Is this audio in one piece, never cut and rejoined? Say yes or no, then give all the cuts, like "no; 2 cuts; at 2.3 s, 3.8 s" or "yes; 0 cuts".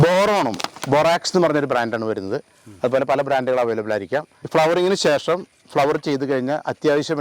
yes; 0 cuts